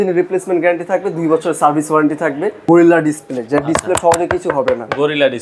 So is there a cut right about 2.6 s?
yes; 1 cut; at 2.6 s

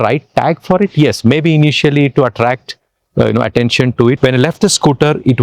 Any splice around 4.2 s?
yes; 1 cut; at 4.2 s

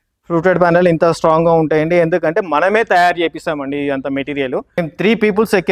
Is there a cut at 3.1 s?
no; 1 cut; at 4.8 s

